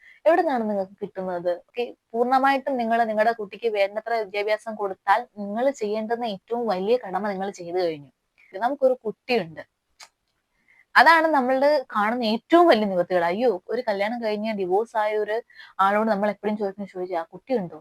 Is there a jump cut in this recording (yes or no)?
yes